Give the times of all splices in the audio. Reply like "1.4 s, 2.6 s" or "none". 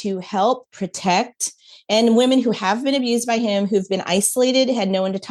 none